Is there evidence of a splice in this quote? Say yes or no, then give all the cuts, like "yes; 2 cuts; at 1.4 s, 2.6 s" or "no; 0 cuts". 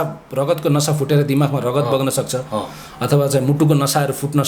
no; 0 cuts